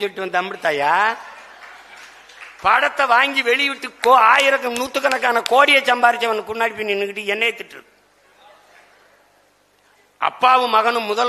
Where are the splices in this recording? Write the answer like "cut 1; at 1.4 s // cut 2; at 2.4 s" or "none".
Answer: none